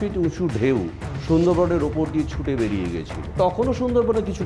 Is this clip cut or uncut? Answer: cut